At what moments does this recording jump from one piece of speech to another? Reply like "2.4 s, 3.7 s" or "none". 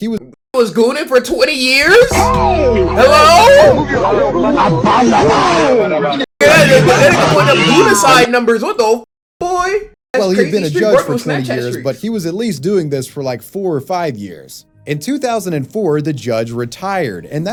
none